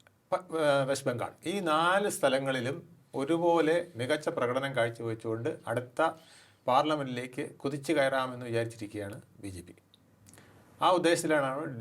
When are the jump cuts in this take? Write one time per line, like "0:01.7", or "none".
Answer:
none